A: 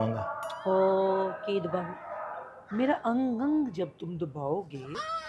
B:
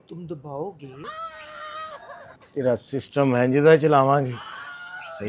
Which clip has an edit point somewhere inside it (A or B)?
B